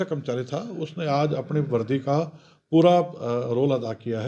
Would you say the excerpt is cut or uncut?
uncut